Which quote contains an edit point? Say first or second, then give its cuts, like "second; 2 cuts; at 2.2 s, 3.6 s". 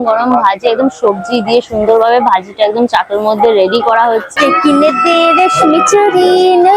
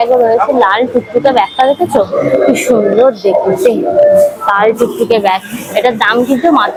first; 1 cut; at 4.3 s